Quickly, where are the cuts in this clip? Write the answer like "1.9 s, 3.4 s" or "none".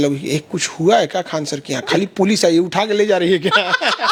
none